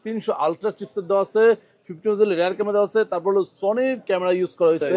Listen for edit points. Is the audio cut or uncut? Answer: uncut